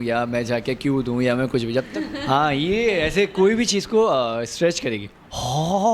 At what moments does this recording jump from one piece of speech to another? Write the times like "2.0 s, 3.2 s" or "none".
1.9 s